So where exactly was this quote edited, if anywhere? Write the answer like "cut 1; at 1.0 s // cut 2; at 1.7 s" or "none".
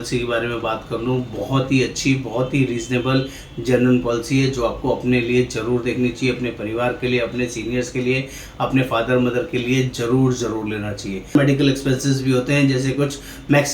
cut 1; at 11.3 s